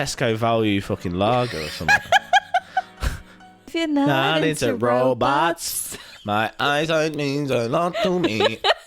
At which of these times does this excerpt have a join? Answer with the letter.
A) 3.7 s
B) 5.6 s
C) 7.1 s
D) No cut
A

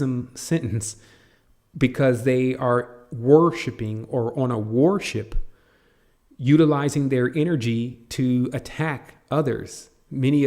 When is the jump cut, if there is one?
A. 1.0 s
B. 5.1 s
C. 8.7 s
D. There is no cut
C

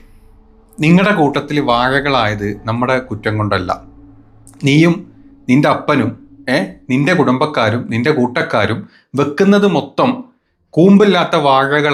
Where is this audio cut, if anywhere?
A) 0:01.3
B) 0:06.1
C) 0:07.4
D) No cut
D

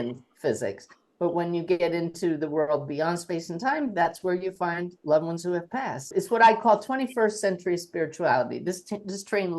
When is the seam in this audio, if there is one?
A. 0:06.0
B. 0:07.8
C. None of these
A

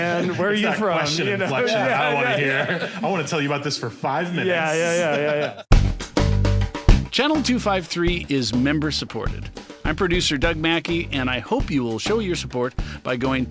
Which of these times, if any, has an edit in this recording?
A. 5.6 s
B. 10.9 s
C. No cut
A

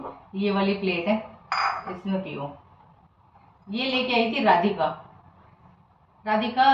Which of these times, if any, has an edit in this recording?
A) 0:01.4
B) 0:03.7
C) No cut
C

